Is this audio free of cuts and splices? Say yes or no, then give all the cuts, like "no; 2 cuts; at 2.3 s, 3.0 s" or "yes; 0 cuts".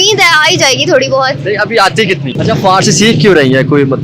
no; 1 cut; at 2.3 s